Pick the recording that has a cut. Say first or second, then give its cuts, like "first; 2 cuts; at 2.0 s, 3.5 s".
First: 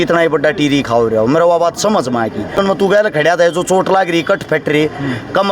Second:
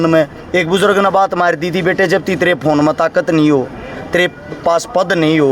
first; 1 cut; at 2.6 s